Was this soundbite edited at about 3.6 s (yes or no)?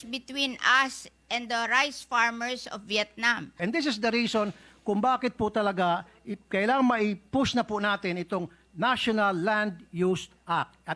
yes